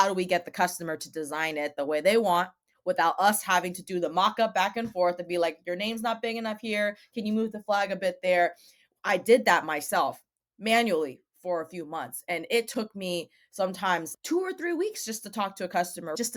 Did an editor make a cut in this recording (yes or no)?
no